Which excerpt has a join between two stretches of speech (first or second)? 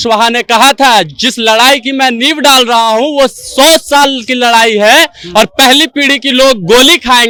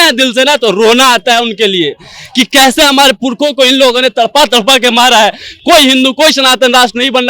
second